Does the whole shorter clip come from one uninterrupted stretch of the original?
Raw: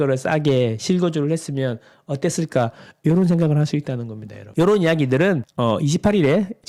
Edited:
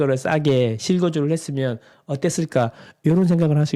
yes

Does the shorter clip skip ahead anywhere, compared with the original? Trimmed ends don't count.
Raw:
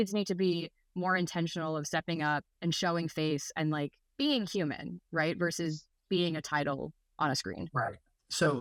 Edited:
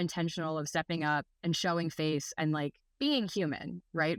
no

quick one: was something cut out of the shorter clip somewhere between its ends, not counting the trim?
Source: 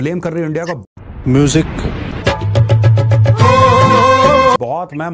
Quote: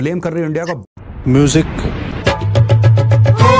no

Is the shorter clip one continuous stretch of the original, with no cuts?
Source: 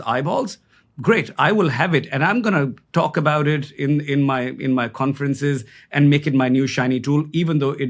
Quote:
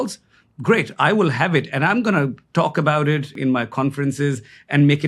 no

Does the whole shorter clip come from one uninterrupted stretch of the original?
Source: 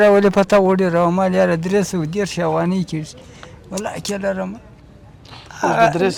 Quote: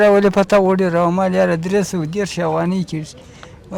yes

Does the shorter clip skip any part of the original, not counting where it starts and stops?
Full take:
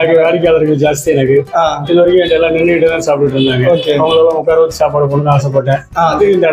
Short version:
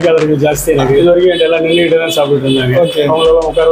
yes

